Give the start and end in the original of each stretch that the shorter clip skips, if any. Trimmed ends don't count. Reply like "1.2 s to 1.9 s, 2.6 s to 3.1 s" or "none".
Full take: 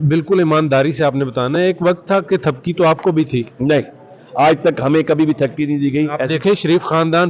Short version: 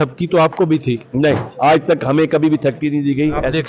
3.9 s to 4.2 s